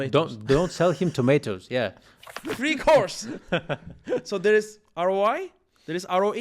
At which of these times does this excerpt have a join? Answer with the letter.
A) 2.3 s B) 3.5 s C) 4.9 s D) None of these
A